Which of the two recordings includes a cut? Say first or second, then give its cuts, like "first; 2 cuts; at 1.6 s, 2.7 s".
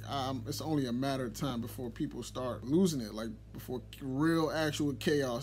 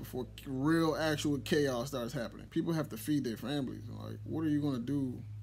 first; 1 cut; at 2.6 s